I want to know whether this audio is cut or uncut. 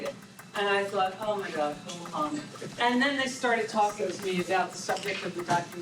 cut